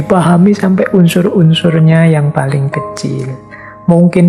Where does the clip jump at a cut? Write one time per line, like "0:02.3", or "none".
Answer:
none